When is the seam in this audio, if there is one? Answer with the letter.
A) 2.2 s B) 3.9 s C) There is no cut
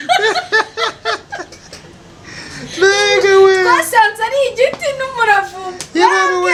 C